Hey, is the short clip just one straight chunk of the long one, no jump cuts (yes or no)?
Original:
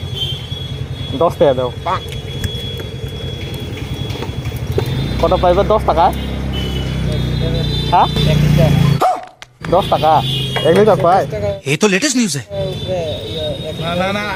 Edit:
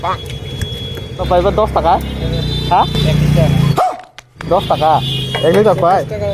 no